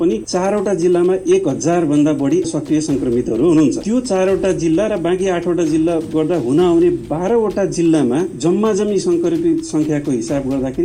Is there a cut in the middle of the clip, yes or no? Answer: no